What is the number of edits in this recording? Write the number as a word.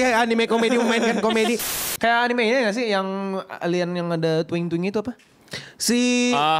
one